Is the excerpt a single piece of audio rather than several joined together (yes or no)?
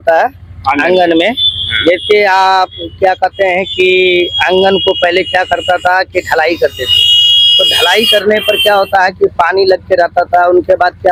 yes